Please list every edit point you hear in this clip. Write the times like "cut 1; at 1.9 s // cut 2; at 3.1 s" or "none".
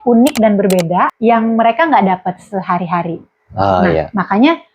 cut 1; at 1.1 s